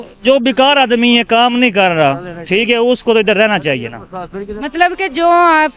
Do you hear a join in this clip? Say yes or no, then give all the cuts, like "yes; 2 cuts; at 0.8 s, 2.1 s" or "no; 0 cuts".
no; 0 cuts